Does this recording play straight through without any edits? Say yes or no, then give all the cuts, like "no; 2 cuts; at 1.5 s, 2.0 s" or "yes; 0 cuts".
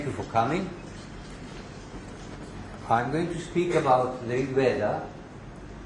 no; 1 cut; at 1.5 s